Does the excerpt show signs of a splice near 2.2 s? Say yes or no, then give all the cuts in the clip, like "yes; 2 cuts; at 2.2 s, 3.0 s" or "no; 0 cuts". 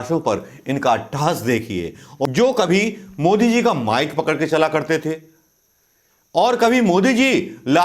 yes; 1 cut; at 2.2 s